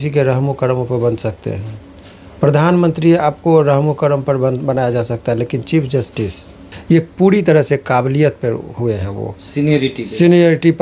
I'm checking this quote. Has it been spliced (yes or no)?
yes